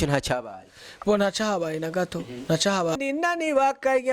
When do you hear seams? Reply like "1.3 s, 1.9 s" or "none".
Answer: 3.0 s

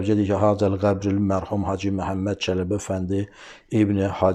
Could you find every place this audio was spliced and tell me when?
none

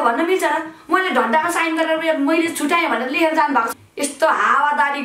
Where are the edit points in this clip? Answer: 3.7 s

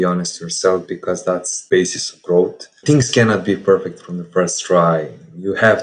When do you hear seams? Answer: 1.5 s

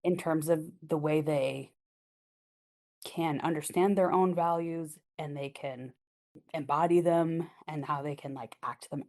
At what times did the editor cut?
6.4 s

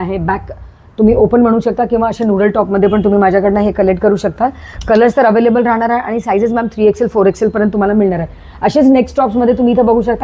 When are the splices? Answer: none

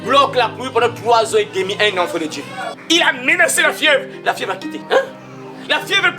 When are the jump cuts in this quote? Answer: 2.8 s

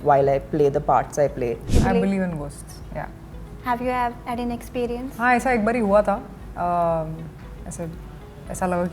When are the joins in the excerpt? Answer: 1.6 s

